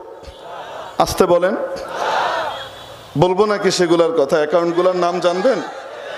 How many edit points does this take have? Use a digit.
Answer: 0